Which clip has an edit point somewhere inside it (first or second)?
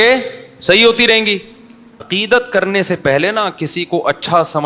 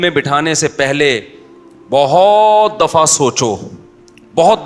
first